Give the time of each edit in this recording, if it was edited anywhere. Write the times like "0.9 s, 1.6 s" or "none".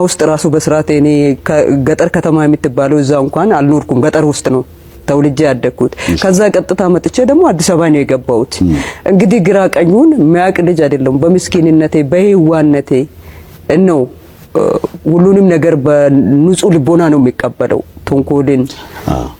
none